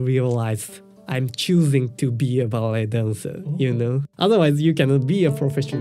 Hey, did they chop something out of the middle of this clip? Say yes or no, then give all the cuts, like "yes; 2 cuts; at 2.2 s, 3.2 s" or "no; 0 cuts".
yes; 1 cut; at 4.1 s